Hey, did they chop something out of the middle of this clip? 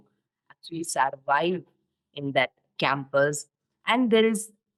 no; 0 cuts

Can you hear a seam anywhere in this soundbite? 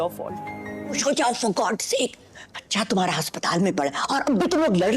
yes; 1 cut; at 1.0 s

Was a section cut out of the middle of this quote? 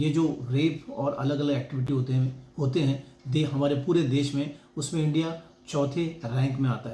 no; 0 cuts

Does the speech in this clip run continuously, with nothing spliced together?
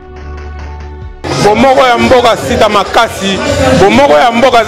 no; 1 cut; at 1.2 s

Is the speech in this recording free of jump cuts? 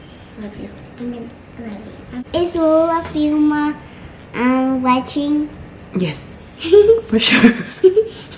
no; 1 cut; at 2.1 s

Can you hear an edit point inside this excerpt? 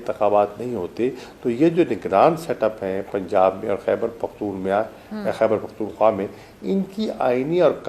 no; 0 cuts

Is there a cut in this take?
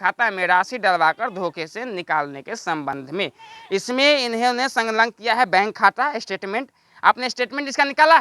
no; 0 cuts

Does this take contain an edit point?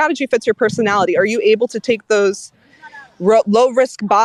no; 0 cuts

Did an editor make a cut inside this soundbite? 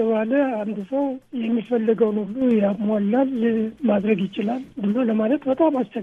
yes; 2 cuts; at 1.3 s, 4.7 s

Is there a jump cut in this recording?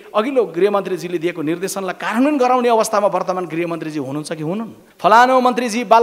yes; 1 cut; at 4.8 s

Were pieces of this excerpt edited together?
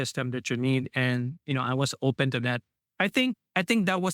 yes; 1 cut; at 3.1 s

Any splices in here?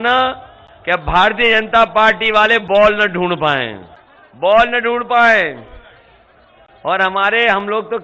no; 0 cuts

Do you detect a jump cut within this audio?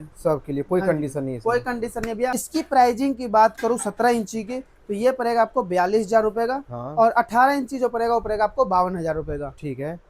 yes; 1 cut; at 2.4 s

